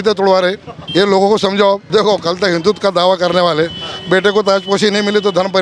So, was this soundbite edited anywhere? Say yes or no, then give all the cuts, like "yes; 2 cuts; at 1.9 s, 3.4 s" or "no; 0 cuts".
yes; 1 cut; at 1.8 s